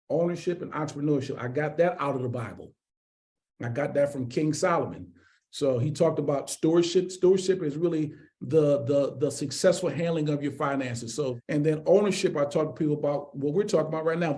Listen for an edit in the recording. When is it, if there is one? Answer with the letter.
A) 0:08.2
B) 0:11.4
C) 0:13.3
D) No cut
B